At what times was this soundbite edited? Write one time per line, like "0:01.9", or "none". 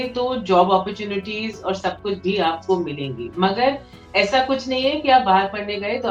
none